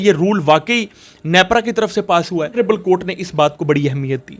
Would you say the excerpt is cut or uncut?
cut